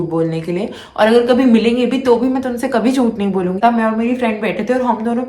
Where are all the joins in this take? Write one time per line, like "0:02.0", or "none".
0:03.6